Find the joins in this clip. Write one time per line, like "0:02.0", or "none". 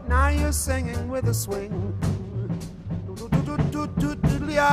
0:01.8